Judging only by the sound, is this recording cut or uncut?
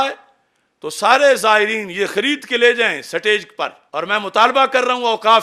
cut